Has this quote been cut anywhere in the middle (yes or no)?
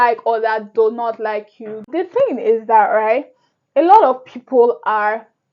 yes